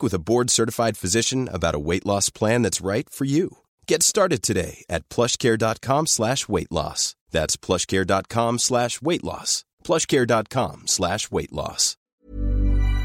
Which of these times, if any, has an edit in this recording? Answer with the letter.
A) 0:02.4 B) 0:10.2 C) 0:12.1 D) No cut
C